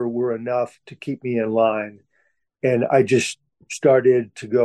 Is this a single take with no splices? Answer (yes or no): yes